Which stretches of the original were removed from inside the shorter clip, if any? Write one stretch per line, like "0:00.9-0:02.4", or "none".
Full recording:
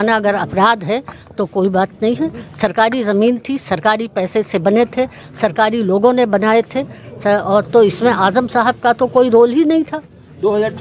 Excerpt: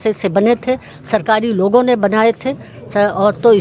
none